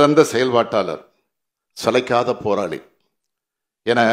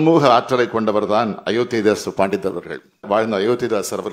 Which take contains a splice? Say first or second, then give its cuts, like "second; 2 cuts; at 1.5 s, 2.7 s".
second; 1 cut; at 3.0 s